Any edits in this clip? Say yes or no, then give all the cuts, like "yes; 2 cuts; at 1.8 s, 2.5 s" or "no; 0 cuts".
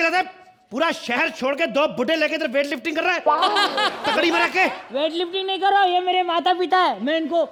no; 0 cuts